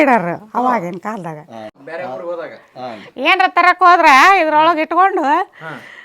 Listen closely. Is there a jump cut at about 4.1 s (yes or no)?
no